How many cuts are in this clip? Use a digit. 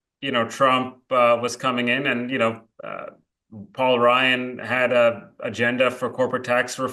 0